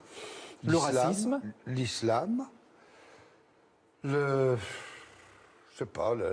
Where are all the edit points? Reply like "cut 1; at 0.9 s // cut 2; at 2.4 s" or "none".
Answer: cut 1; at 4.4 s